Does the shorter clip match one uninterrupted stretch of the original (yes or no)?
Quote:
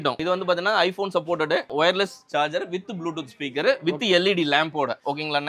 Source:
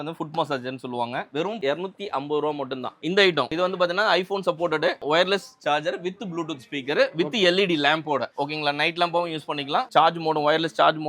yes